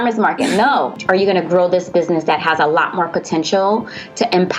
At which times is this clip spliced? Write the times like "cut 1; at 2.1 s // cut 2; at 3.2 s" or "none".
cut 1; at 1.0 s